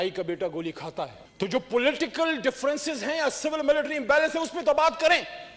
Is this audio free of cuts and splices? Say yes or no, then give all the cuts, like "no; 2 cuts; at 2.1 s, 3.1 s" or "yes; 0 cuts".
yes; 0 cuts